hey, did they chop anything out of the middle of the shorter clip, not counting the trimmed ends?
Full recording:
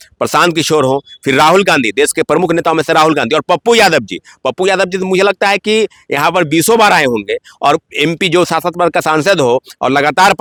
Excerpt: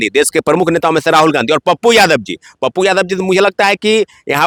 no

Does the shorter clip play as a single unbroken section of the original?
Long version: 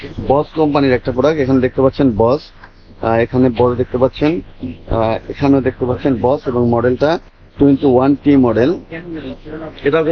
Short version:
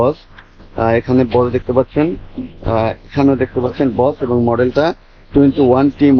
yes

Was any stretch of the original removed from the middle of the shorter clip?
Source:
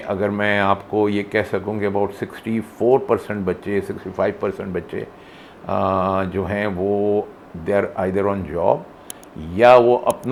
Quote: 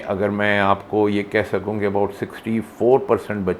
no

